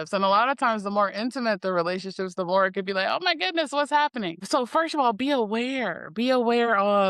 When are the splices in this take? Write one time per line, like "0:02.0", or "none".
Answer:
0:04.4